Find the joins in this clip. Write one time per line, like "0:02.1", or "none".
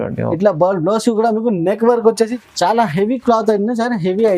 0:02.4